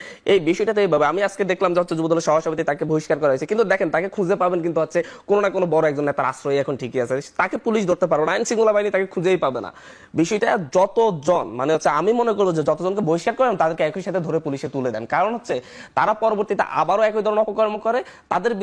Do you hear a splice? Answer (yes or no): no